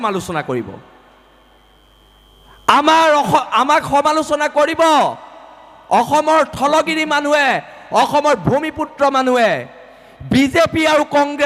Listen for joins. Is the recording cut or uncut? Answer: uncut